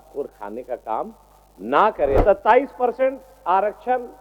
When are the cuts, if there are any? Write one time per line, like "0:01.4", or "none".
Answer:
0:02.2